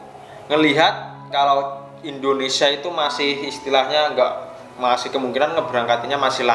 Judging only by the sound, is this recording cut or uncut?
uncut